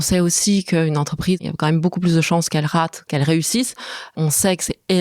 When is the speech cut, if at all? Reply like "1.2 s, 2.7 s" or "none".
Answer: 1.5 s, 3.1 s, 4.1 s